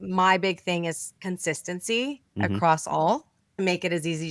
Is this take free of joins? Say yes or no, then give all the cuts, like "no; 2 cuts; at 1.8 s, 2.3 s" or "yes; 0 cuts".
no; 2 cuts; at 1.1 s, 3.5 s